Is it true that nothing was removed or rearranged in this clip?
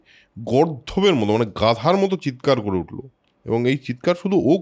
yes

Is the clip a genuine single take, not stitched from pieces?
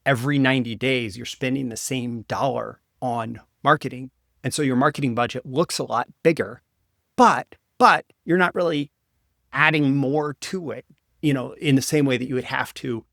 yes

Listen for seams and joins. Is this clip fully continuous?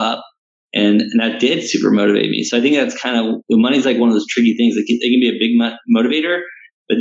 yes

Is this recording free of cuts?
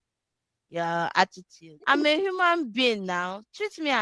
no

